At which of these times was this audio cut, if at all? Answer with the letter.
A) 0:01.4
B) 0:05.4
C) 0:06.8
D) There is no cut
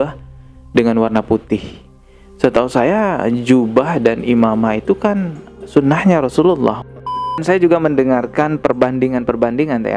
C